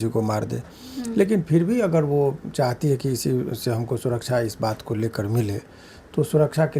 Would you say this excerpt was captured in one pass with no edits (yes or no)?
yes